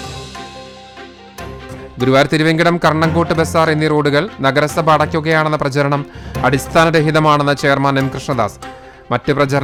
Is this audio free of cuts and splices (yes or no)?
yes